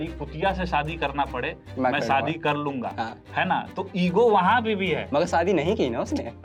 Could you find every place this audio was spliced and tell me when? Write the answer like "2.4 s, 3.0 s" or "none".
none